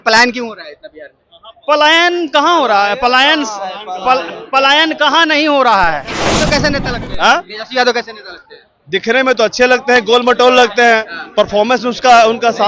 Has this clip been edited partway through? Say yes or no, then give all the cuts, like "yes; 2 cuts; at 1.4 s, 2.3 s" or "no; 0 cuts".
yes; 1 cut; at 6.5 s